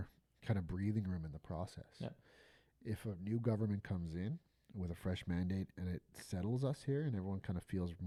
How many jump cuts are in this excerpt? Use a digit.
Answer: 0